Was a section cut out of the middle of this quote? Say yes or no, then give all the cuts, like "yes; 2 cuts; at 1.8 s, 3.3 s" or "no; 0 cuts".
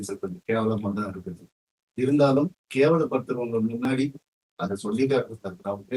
no; 0 cuts